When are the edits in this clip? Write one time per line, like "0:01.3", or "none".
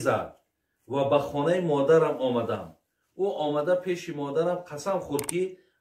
none